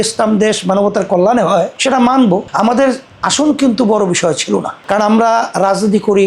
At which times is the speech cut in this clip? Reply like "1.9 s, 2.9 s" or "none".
none